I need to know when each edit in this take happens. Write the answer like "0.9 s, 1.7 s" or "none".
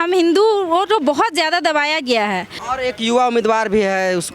2.6 s